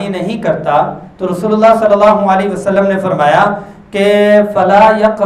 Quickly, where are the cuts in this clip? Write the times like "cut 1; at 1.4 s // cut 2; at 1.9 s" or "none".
none